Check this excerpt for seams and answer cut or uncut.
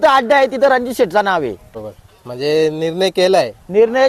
cut